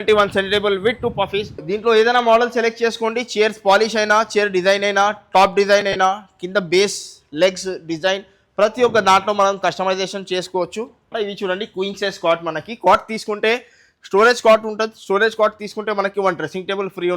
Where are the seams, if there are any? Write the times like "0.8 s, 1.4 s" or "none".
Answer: 1.6 s, 11.1 s